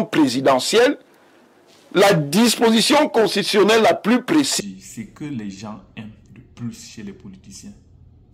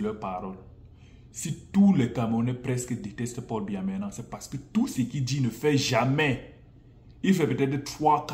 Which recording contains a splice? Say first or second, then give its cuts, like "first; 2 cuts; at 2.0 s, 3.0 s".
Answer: first; 1 cut; at 4.5 s